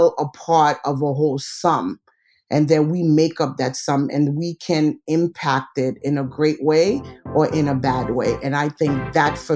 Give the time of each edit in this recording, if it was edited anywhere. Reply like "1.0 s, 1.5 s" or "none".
none